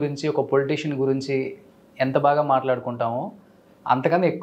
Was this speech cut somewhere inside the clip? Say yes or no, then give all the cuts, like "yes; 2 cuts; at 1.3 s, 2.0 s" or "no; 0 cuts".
no; 0 cuts